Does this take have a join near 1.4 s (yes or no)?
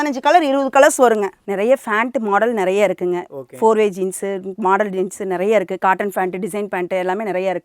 yes